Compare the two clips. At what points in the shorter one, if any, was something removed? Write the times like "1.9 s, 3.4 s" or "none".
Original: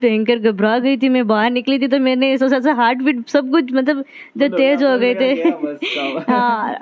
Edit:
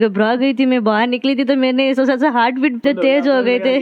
2.8 s